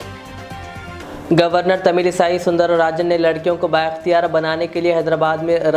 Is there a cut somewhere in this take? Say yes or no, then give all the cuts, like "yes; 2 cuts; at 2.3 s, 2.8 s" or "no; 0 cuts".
yes; 1 cut; at 1.0 s